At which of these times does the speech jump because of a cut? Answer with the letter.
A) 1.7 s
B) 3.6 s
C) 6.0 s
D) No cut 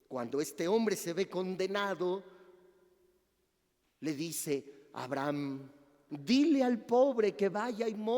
C